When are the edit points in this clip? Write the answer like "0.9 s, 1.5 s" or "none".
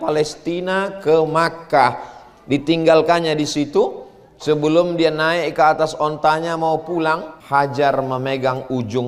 7.3 s